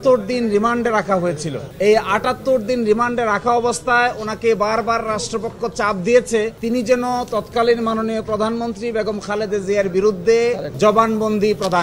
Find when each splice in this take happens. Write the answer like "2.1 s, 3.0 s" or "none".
none